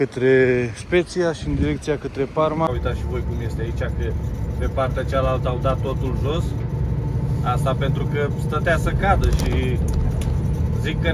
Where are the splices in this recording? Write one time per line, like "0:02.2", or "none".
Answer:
0:02.7

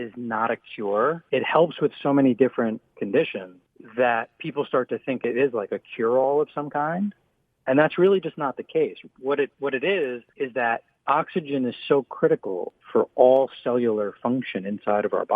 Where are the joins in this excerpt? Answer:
0:01.2

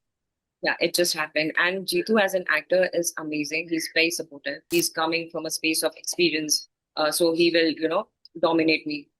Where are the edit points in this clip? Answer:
0:04.7

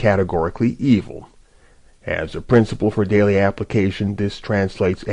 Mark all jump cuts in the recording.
0:03.8

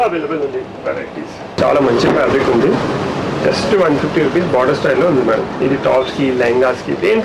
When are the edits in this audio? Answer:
0:01.6

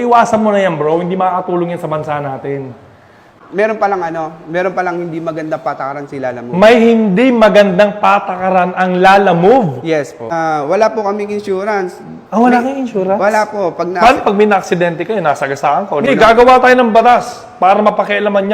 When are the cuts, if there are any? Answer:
0:03.2
0:10.3
0:16.1

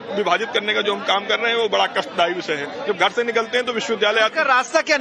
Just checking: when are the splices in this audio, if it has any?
none

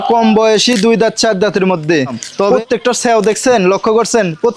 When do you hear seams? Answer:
0:02.5

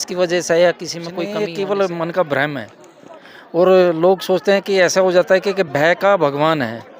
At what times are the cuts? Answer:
0:01.3

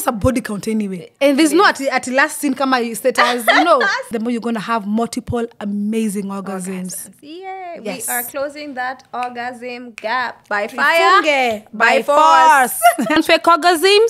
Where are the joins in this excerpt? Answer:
0:01.0
0:04.1
0:13.2

